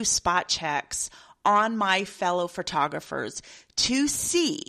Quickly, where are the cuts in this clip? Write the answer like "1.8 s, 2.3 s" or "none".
none